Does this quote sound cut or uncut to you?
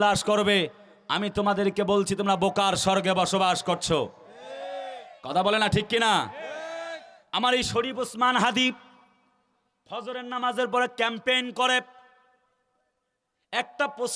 uncut